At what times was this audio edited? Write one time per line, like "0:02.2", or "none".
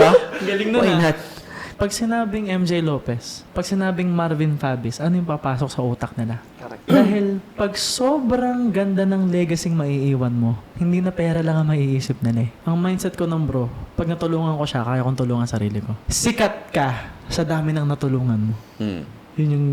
0:01.7
0:12.5
0:16.0

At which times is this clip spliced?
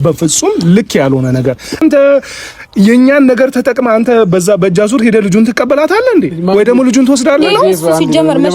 0:01.8

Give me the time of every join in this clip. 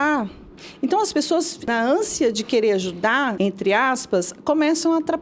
0:01.7
0:03.4

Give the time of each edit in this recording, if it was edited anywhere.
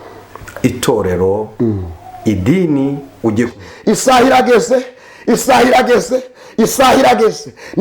0:03.5

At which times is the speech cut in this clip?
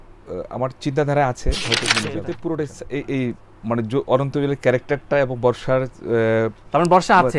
0:02.2

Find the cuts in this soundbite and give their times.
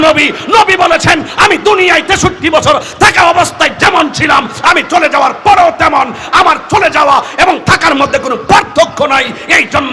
none

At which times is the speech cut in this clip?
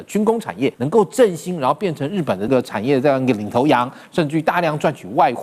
0:00.8
0:02.5

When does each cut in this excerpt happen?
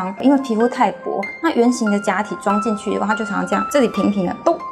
0:03.7

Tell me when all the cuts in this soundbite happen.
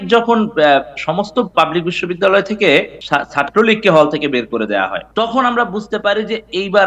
0:03.0
0:05.0

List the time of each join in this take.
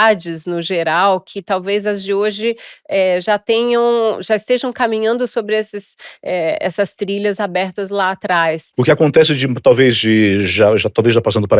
0:08.6

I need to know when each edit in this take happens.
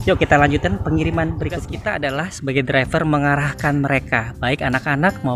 0:01.7

